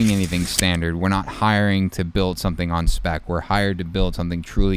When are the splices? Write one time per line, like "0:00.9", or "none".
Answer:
none

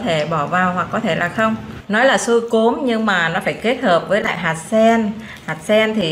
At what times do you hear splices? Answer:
0:01.7

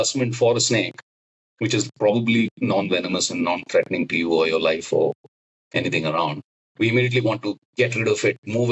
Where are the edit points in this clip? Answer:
none

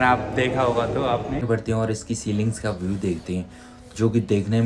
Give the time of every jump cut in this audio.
0:01.4

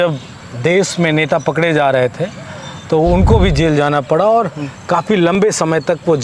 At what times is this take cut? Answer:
none

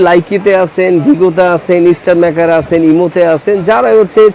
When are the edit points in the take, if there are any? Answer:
none

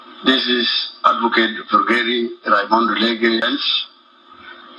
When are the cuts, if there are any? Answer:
0:03.5

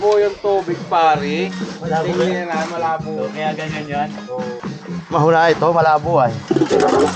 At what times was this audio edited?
none

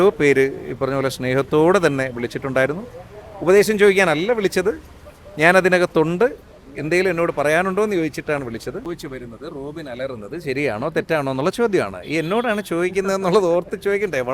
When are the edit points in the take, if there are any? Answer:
0:08.9

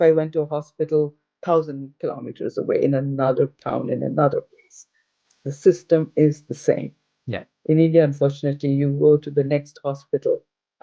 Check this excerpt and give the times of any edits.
none

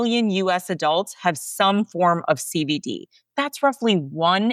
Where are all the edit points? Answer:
none

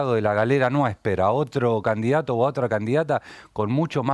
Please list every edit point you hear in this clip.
none

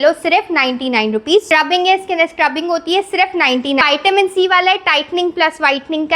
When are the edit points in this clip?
0:01.5
0:03.8

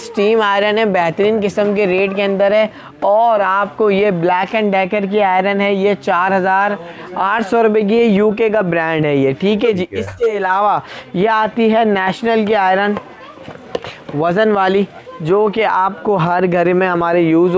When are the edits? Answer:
none

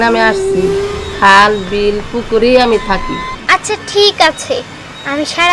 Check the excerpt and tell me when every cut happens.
0:03.3

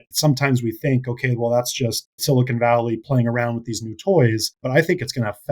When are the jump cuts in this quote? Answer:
0:04.5

